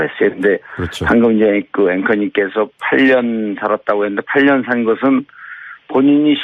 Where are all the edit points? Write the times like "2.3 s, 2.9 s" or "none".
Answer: none